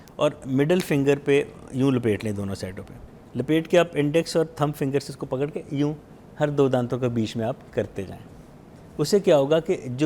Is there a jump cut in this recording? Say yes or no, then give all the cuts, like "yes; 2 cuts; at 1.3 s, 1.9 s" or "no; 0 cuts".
no; 0 cuts